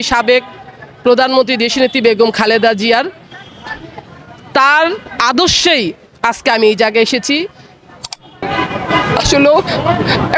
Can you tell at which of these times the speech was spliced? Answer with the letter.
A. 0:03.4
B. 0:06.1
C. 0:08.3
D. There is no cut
C